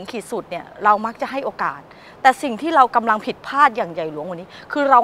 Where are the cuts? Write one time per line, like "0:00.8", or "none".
none